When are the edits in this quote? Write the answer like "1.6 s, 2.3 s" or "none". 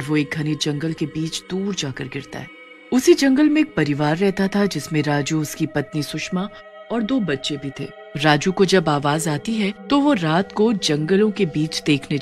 none

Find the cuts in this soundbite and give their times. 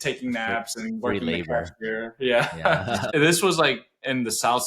3.0 s

